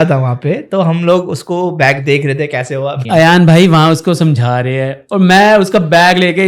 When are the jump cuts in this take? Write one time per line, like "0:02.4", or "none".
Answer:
0:03.0